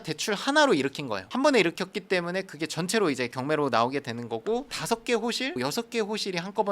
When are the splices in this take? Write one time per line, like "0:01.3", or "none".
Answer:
0:04.8